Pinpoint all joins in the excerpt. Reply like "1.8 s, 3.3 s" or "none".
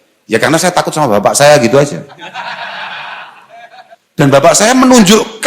4.4 s